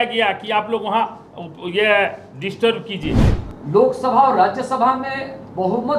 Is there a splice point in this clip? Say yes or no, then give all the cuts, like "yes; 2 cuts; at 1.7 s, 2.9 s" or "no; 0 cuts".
yes; 1 cut; at 3.3 s